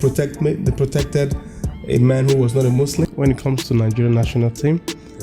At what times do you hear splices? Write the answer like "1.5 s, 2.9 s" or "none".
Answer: 3.0 s